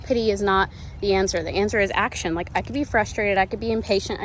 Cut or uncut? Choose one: uncut